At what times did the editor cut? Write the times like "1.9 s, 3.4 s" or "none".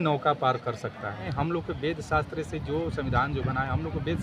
1.3 s